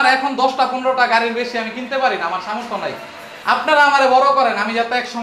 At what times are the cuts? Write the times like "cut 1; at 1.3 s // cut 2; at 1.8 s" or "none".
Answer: none